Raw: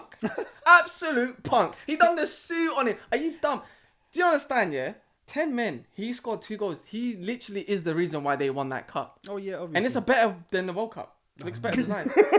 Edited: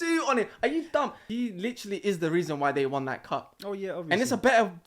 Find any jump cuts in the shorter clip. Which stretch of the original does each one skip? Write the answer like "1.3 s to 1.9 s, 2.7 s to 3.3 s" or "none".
3.7 s to 6.9 s